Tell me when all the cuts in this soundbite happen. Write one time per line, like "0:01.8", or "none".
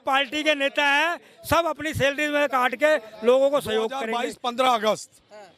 0:04.0